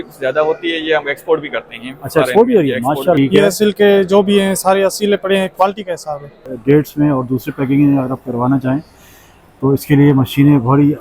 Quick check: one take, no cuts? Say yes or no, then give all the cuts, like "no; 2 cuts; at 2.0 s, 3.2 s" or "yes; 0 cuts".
no; 2 cuts; at 3.2 s, 6.5 s